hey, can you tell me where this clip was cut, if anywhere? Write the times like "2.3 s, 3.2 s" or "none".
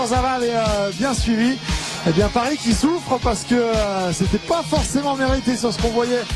2.2 s